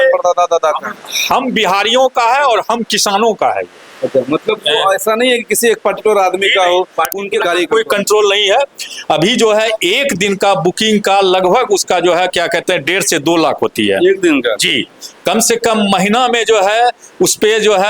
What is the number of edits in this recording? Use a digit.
1